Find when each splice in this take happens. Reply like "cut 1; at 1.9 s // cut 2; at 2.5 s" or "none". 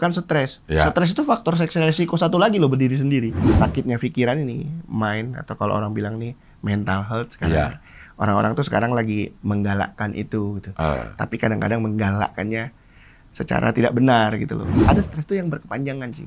cut 1; at 3.5 s // cut 2; at 14.8 s